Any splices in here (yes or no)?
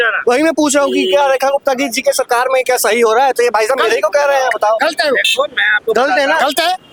no